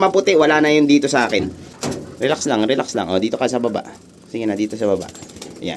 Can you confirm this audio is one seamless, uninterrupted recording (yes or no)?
no